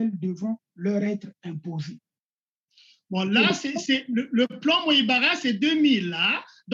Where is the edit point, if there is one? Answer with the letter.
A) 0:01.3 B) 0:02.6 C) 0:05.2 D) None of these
D